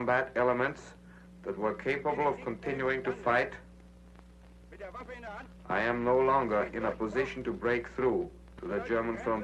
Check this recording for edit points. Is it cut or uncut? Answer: uncut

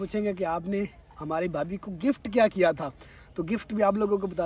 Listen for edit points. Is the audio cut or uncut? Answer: uncut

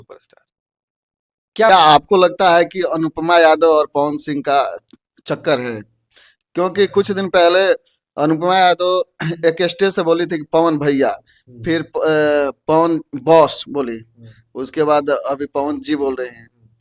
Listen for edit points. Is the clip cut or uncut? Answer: cut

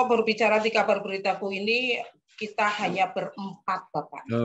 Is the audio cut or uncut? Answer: uncut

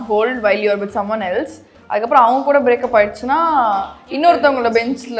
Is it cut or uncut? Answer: uncut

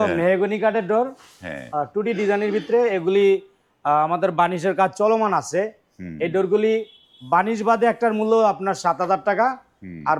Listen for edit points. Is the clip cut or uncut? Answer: uncut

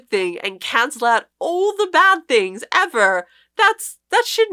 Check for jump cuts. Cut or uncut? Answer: uncut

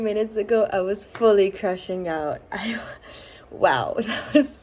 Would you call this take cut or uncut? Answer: uncut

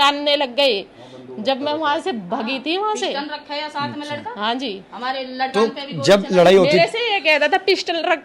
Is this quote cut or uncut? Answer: uncut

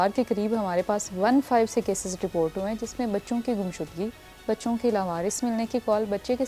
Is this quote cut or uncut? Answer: uncut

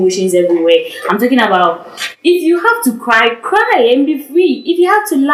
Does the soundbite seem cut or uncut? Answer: uncut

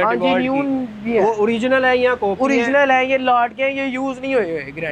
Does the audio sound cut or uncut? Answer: uncut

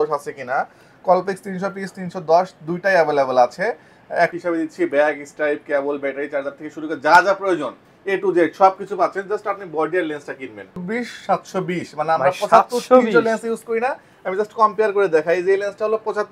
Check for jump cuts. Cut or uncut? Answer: cut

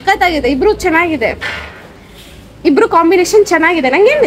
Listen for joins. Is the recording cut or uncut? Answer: uncut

